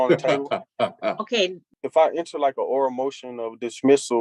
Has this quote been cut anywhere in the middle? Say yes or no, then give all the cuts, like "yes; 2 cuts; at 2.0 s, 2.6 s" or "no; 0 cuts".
yes; 1 cut; at 1.6 s